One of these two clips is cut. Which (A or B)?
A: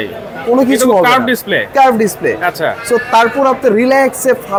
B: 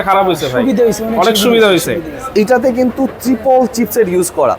B